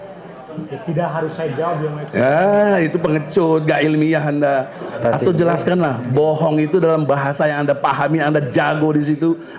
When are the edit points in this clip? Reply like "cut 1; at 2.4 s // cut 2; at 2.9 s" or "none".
cut 1; at 5.0 s